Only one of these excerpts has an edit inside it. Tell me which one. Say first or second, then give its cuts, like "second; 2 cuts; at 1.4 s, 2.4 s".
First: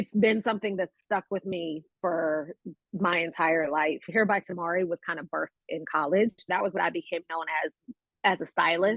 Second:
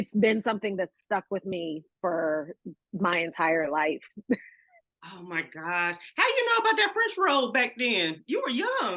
first; 2 cuts; at 4.1 s, 6.8 s